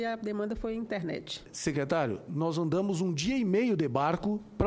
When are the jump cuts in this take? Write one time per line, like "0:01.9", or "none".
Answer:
0:01.5